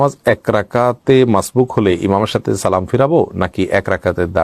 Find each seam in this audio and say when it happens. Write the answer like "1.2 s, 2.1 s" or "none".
none